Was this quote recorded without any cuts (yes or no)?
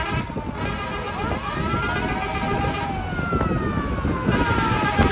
yes